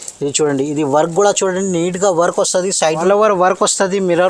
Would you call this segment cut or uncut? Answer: cut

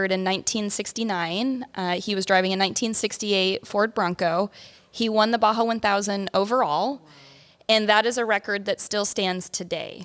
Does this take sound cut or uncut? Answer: uncut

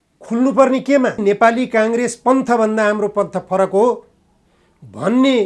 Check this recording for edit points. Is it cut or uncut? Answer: cut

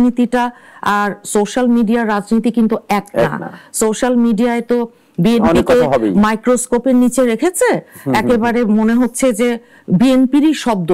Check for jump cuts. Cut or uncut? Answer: uncut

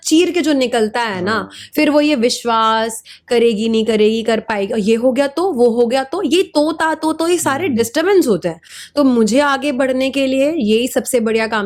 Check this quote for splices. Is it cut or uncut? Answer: uncut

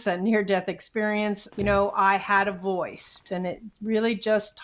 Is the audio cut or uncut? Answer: cut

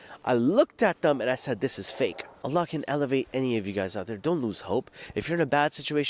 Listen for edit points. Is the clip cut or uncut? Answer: cut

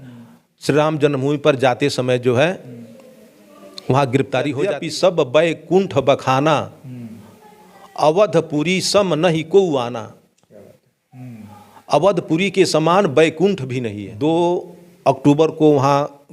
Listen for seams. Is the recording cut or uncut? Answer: cut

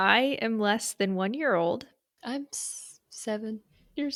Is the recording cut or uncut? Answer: uncut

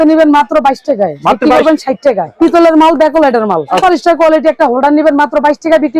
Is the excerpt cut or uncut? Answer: cut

